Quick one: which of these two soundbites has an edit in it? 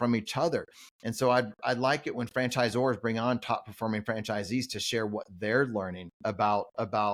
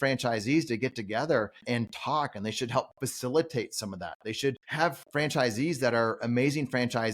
second; 2 cuts; at 1.6 s, 5.0 s

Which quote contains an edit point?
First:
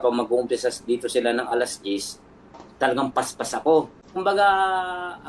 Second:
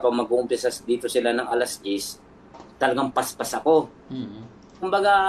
first; 1 cut; at 4.0 s

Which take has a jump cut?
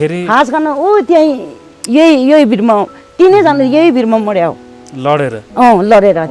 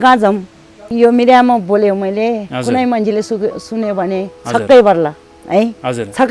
second; 1 cut; at 0.9 s

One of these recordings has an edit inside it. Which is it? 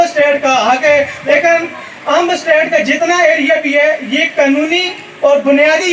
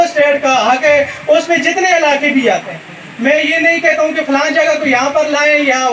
first; 1 cut; at 1.3 s

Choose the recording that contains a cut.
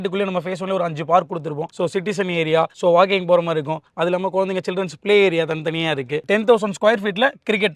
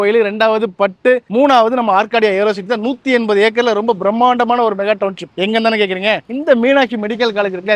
first; 1 cut; at 6.2 s

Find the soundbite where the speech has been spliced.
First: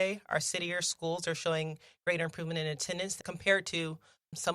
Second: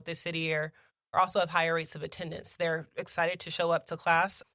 first; 1 cut; at 3.2 s

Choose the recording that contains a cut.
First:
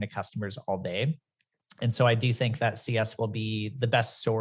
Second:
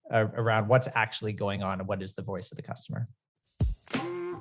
second; 1 cut; at 3.5 s

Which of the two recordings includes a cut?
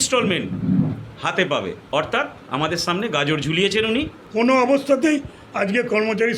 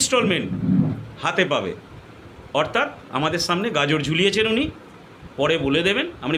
first; 2 cuts; at 1.8 s, 4.2 s

